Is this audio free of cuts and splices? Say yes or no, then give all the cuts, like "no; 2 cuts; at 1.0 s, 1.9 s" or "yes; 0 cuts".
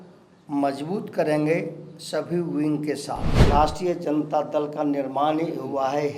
no; 1 cut; at 3.4 s